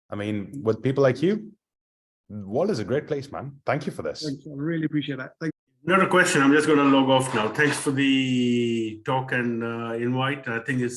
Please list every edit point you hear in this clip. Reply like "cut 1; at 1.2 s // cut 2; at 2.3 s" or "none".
cut 1; at 5.4 s

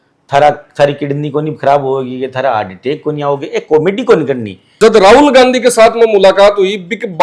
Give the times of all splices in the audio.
cut 1; at 4.6 s

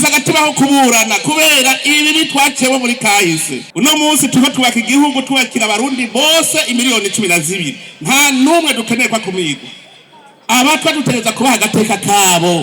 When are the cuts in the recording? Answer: cut 1; at 3.6 s

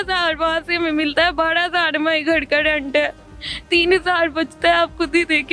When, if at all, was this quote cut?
none

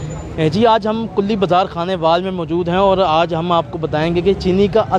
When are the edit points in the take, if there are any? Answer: none

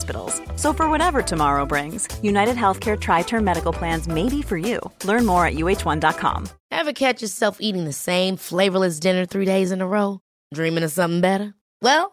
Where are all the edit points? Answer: cut 1; at 6.5 s

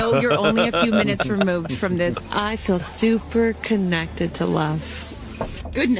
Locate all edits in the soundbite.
none

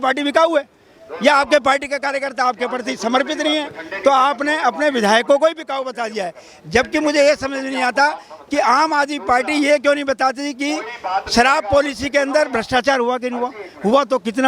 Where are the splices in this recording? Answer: none

